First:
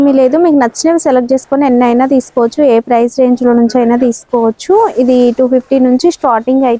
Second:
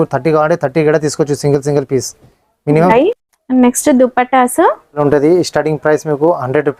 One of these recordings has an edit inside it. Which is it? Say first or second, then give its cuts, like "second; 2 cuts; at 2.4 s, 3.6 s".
second; 2 cuts; at 2.9 s, 5.0 s